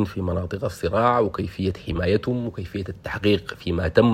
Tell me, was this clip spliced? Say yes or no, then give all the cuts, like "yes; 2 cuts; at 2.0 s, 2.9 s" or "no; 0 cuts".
no; 0 cuts